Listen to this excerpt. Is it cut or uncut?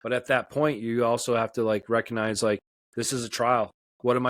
cut